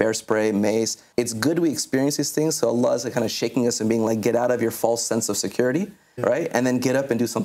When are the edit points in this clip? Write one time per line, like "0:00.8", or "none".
0:01.0
0:06.1

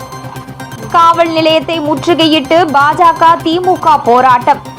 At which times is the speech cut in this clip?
0:00.9

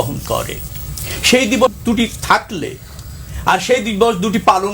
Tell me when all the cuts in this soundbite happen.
0:01.7

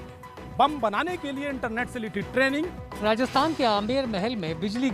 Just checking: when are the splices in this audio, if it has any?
0:02.8

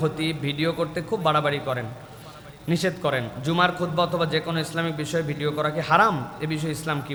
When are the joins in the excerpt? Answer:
none

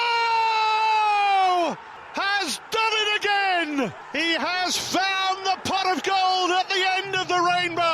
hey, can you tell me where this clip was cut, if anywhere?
0:01.9
0:04.0

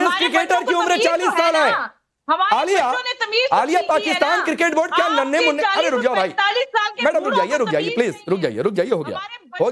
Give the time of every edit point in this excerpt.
none

